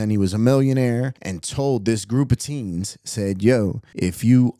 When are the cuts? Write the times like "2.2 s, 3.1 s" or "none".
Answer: none